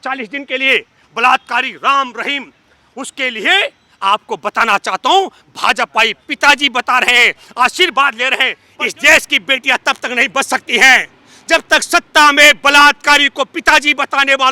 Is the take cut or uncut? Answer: cut